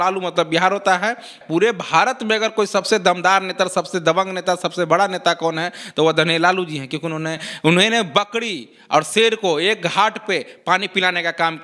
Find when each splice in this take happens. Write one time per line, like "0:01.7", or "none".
0:01.3